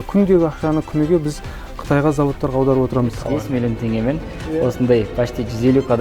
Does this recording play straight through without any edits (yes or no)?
no